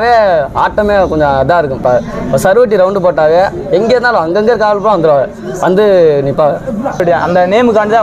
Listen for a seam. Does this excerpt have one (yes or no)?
yes